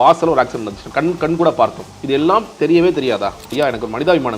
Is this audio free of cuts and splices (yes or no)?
no